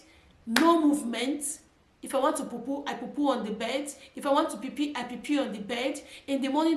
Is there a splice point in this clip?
no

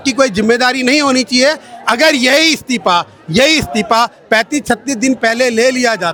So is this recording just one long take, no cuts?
yes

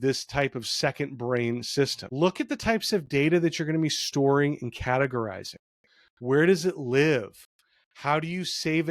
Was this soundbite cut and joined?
yes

